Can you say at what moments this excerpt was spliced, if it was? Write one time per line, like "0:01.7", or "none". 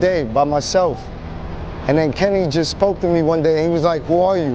0:02.4